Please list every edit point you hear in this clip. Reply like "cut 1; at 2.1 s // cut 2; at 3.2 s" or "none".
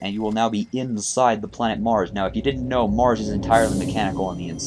none